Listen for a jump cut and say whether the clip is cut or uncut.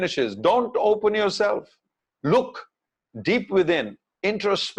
uncut